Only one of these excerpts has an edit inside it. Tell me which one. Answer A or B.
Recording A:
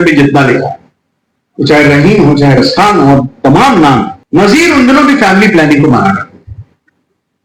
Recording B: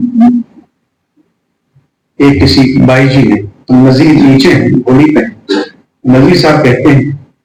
A